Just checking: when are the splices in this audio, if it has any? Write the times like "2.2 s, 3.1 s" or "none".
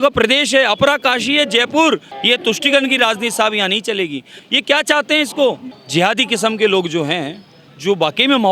2.1 s, 4.4 s, 5.7 s